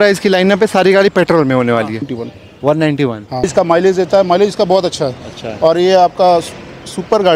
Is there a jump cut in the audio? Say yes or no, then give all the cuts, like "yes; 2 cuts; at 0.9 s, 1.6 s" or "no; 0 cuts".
yes; 2 cuts; at 2.2 s, 3.4 s